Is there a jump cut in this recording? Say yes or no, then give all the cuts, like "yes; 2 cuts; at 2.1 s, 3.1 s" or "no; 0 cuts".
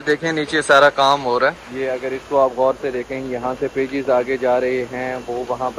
yes; 1 cut; at 1.7 s